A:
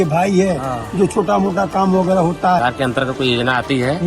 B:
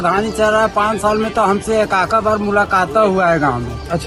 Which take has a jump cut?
A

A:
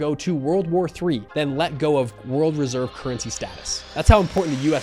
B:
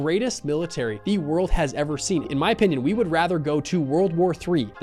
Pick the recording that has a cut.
B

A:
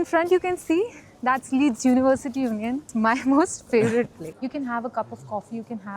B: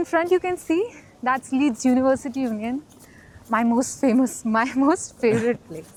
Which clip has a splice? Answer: A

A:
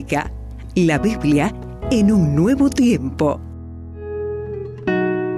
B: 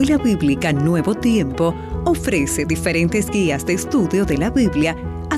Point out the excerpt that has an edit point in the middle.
A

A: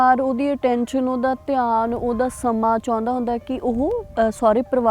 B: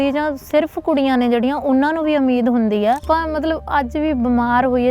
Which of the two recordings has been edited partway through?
B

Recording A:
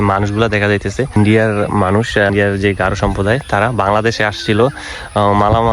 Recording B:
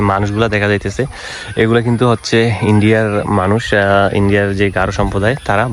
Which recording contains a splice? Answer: A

